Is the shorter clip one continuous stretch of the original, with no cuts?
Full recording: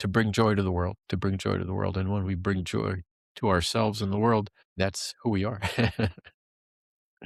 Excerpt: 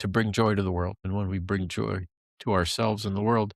no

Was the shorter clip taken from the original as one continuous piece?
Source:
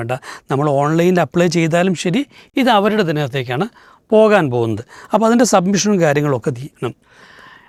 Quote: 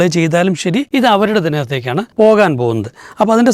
no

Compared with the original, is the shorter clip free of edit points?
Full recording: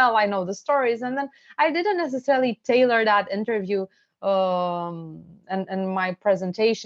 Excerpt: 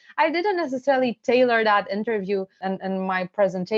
no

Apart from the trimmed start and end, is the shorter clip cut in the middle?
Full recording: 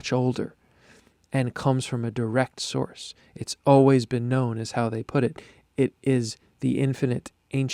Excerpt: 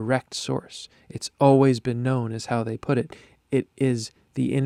no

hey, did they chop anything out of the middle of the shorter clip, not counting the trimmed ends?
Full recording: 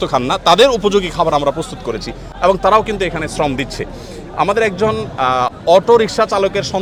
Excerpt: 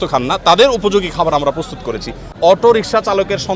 yes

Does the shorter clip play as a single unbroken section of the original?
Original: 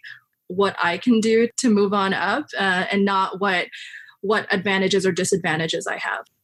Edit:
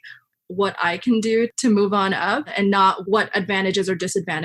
no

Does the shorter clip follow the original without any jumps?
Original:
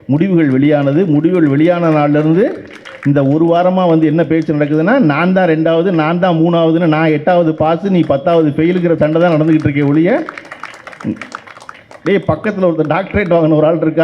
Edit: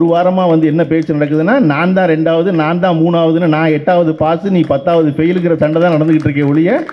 yes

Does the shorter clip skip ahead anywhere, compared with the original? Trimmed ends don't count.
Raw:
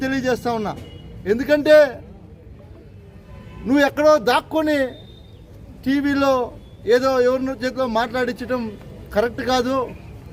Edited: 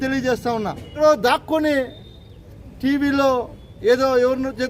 yes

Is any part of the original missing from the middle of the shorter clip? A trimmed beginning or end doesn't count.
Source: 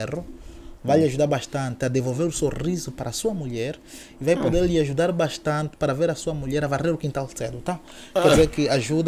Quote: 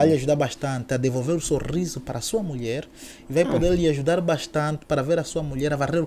no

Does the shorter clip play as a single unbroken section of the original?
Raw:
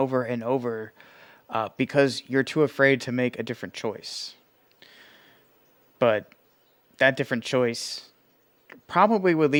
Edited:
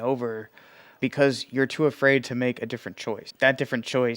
no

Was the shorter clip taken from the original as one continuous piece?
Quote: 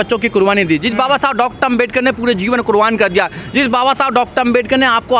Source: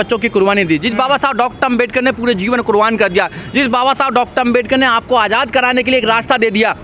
yes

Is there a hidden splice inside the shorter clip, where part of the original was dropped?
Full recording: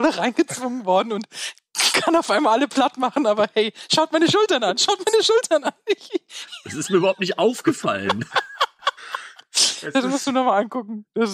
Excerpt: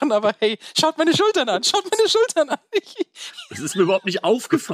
no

